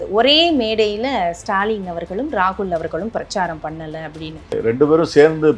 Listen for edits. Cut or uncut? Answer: cut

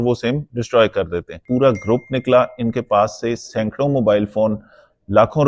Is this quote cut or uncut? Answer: cut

